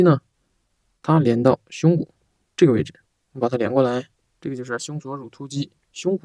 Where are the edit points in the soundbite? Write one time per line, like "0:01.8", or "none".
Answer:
0:04.2

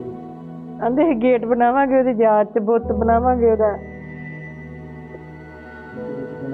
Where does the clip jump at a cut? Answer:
none

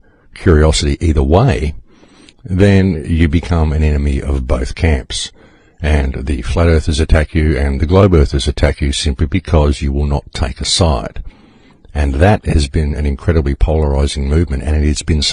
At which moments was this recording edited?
0:01.1

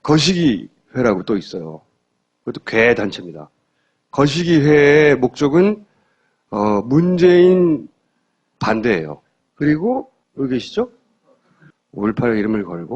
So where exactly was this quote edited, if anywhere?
0:08.4

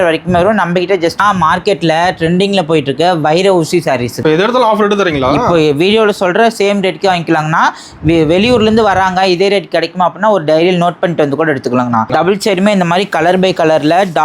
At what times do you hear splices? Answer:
0:01.2
0:04.1
0:12.1

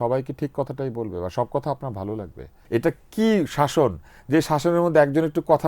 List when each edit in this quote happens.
0:02.5

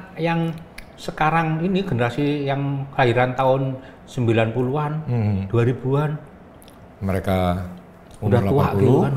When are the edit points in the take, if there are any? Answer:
none

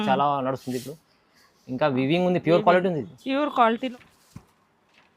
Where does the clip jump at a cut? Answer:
0:03.9

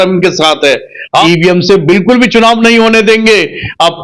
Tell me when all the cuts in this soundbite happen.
0:01.2

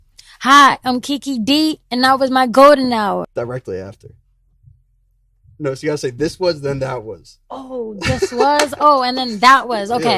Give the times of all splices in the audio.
0:03.3

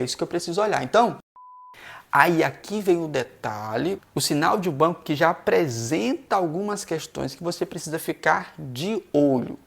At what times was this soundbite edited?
0:01.4

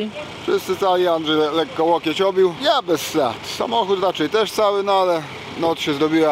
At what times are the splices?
0:02.6

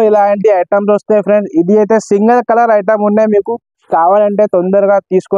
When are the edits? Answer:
none

